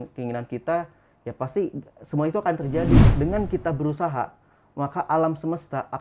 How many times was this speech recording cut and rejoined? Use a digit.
1